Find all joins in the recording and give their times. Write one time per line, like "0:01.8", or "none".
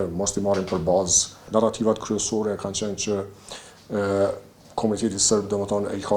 0:01.4